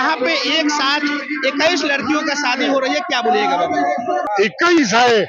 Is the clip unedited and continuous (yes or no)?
no